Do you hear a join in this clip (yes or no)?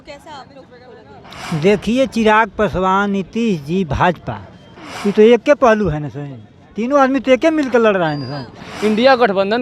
yes